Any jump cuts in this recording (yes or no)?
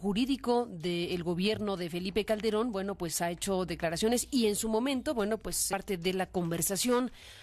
no